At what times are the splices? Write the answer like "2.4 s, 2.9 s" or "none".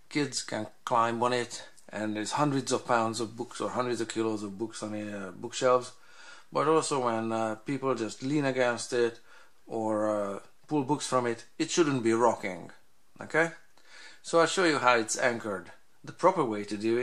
none